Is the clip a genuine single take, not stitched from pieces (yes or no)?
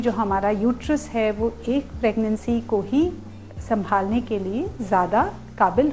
yes